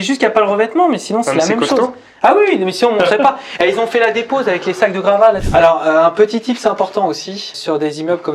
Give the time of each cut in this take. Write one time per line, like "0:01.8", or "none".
0:05.4